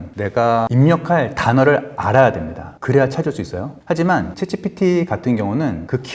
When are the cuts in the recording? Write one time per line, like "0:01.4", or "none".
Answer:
none